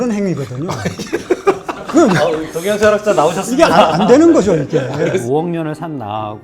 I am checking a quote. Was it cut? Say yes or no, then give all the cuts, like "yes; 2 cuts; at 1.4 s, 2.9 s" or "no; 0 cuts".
yes; 1 cut; at 5.2 s